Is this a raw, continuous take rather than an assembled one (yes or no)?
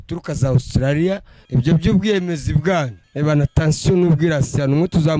no